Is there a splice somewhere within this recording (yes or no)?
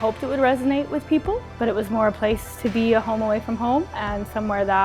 yes